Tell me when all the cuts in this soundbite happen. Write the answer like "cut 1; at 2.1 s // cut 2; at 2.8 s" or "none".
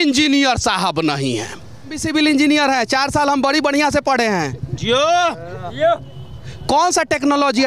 cut 1; at 2.0 s